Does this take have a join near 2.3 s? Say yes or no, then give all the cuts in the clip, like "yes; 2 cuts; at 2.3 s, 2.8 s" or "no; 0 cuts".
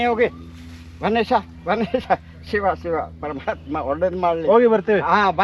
no; 0 cuts